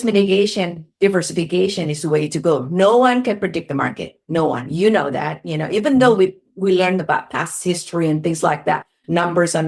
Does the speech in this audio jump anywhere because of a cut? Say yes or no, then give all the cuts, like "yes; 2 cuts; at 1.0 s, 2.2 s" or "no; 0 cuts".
no; 0 cuts